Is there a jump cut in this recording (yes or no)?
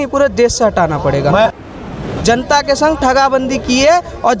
yes